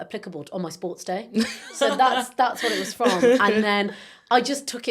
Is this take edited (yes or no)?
no